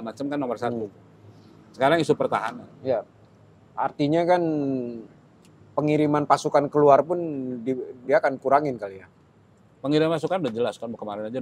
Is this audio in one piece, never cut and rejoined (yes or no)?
yes